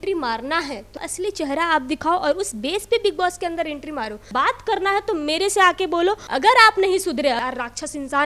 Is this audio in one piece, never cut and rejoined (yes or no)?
no